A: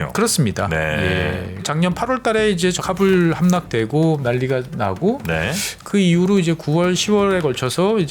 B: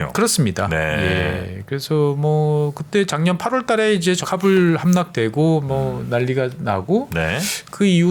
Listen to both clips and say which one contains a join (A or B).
A